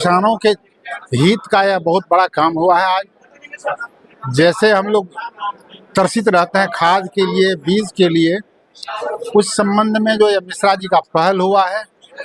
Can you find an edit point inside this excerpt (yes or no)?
no